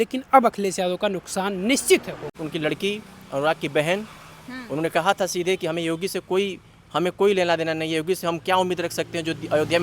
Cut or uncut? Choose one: cut